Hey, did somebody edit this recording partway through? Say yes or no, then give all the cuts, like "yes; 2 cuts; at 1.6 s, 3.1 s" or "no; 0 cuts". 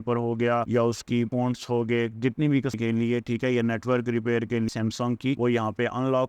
yes; 2 cuts; at 2.8 s, 4.7 s